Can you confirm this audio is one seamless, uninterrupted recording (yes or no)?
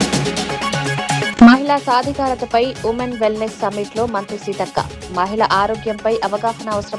no